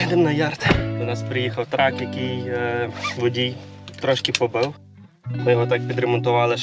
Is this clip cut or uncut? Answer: cut